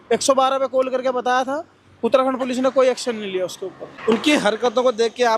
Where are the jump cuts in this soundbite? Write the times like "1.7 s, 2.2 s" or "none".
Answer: none